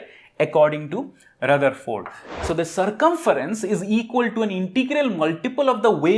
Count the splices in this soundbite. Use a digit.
1